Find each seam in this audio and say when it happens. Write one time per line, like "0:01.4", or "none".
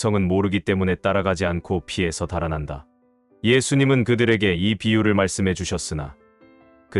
none